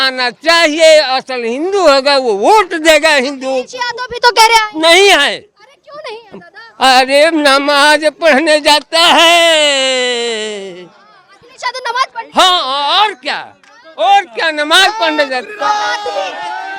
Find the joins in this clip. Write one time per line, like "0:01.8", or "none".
none